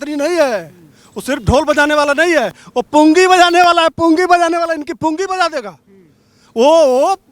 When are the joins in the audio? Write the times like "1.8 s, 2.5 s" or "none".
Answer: none